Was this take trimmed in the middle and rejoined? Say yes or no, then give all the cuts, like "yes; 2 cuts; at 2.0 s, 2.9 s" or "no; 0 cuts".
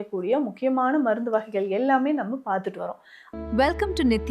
yes; 1 cut; at 3.1 s